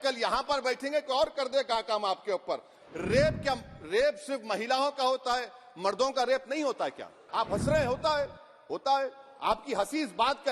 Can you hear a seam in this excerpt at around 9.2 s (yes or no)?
no